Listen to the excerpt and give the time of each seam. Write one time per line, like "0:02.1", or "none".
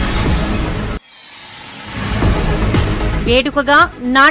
0:00.9
0:01.7